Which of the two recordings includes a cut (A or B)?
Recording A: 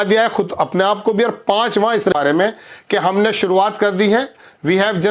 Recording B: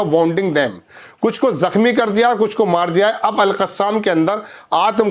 A